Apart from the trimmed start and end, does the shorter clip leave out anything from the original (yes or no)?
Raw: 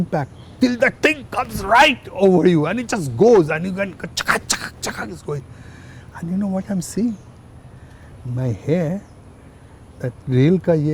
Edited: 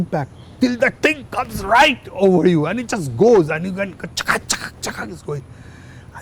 no